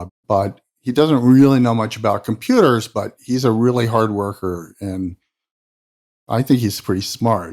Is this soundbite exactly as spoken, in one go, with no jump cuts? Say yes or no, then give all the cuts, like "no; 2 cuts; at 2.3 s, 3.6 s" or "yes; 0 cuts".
yes; 0 cuts